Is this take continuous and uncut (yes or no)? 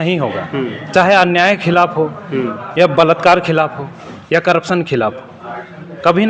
yes